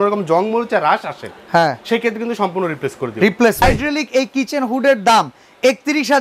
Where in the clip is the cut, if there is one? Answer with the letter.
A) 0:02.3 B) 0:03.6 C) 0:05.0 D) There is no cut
B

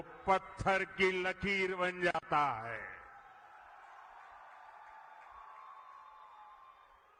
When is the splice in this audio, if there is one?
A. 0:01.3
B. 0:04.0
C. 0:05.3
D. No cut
D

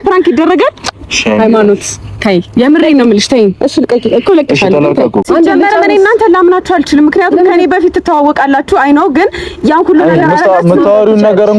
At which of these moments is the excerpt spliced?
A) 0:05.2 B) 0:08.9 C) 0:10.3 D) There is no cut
A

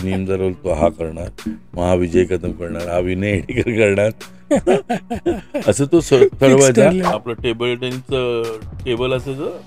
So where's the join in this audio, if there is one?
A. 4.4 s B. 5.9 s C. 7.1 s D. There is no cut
C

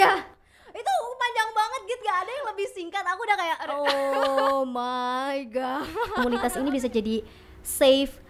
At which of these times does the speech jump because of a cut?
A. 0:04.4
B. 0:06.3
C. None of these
B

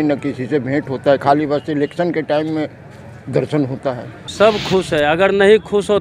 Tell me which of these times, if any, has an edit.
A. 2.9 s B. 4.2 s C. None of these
B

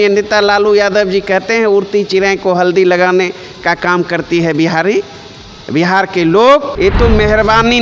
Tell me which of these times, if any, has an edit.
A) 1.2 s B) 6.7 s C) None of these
B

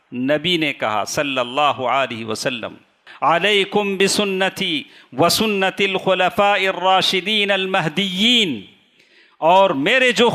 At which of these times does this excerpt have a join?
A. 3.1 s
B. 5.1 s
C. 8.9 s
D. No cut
A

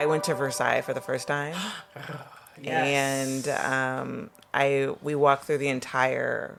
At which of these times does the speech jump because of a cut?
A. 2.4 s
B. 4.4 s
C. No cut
C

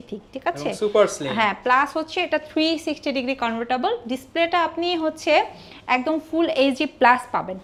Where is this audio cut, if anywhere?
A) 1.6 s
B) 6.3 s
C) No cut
C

